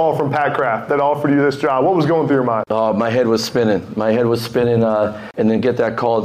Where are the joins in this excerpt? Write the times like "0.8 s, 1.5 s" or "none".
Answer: 2.6 s, 5.2 s

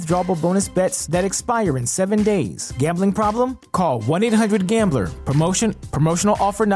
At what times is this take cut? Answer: none

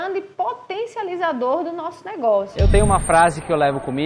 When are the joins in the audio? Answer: 2.5 s

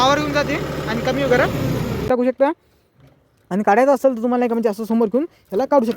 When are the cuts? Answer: 2.1 s

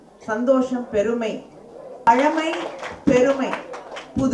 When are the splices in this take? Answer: 2.1 s

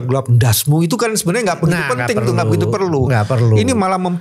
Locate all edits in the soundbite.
none

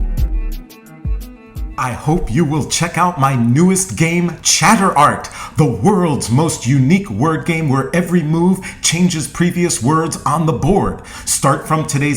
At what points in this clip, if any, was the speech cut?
1.6 s

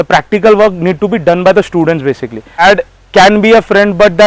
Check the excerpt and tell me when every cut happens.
2.6 s

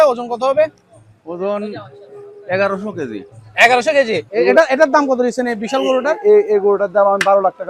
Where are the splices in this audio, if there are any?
4.2 s

